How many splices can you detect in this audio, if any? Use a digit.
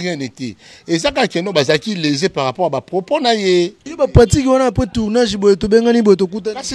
1